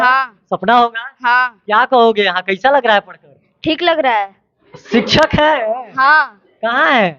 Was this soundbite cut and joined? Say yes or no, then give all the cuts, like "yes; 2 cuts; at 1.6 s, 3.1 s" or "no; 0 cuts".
no; 0 cuts